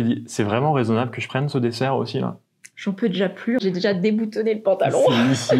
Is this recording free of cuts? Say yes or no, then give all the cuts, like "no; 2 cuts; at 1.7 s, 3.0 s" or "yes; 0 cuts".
no; 1 cut; at 3.6 s